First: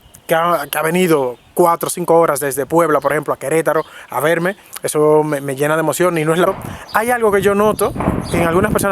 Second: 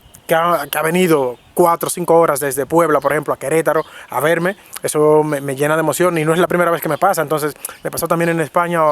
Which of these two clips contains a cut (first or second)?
first